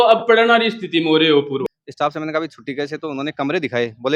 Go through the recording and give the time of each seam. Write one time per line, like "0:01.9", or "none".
0:01.6